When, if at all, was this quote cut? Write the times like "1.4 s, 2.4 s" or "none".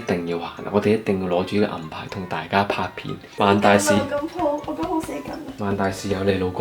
none